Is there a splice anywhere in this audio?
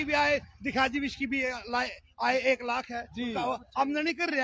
no; 0 cuts

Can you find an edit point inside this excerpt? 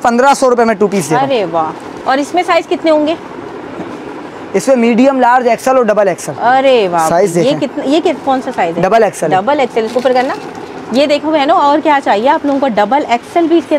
no; 0 cuts

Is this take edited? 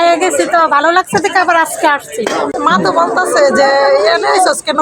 yes; 1 cut; at 2.5 s

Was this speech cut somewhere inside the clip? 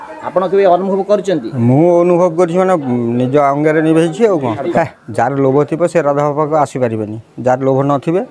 yes; 1 cut; at 4.7 s

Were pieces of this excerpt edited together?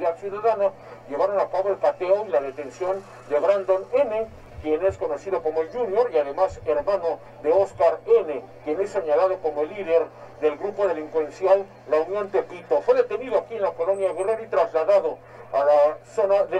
no; 0 cuts

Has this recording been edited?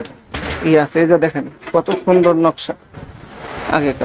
no; 0 cuts

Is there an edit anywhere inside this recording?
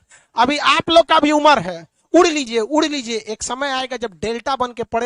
no; 0 cuts

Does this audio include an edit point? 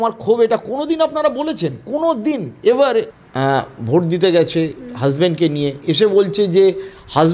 yes; 1 cut; at 3.2 s

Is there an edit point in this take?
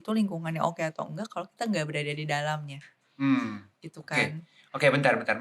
no; 0 cuts

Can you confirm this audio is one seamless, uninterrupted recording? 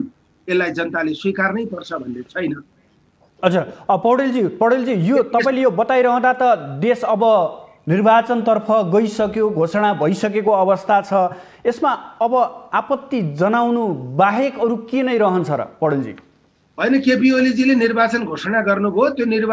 yes; 0 cuts

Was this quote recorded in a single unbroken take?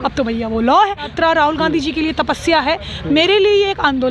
no; 1 cut; at 1.1 s

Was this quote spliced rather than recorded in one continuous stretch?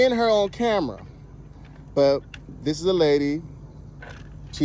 no; 0 cuts

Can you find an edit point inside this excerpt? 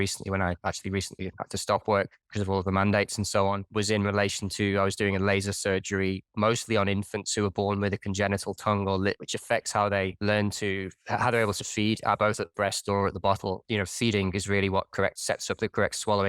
yes; 3 cuts; at 9.2 s, 13.6 s, 15.2 s

